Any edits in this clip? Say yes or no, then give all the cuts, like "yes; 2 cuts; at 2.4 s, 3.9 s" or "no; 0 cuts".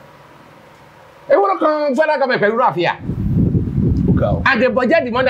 no; 0 cuts